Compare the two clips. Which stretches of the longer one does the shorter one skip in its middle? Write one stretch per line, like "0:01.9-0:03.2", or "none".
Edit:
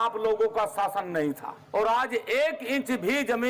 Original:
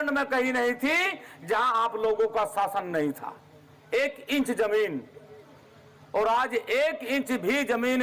0:03.3-0:05.9